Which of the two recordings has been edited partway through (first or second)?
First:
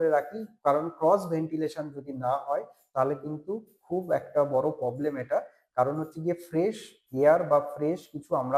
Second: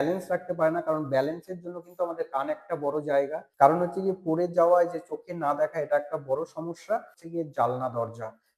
second